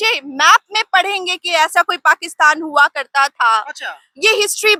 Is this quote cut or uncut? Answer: uncut